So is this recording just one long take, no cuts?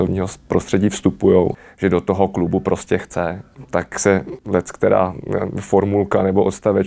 no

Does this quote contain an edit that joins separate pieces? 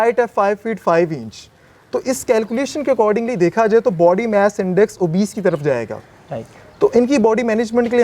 no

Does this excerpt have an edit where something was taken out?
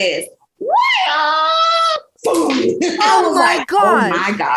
no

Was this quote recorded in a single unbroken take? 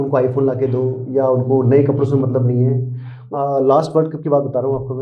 no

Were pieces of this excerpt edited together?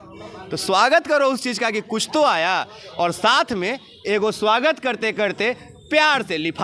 no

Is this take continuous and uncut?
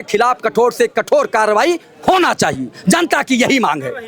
yes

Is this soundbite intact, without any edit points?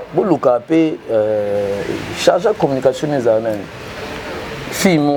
yes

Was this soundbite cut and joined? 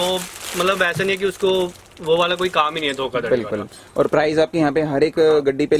no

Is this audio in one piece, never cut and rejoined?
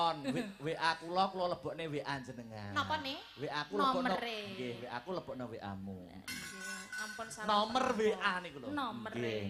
yes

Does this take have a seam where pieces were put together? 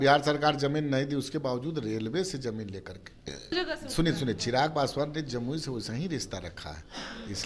yes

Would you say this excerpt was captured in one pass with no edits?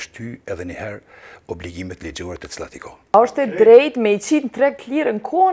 no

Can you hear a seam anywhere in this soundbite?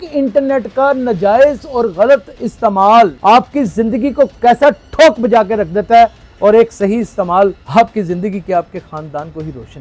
yes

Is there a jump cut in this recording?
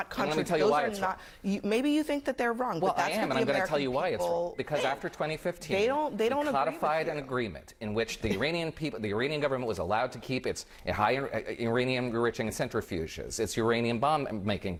no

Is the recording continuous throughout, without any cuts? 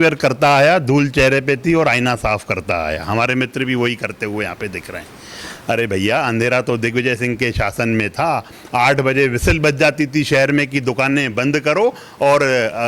yes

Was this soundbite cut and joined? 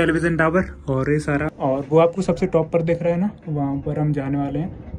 yes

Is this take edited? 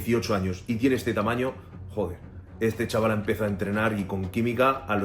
no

